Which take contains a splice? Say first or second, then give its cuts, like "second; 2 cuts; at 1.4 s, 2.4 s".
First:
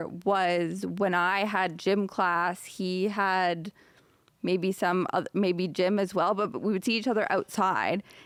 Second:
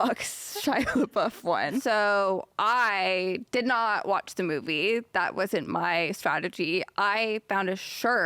second; 1 cut; at 1.8 s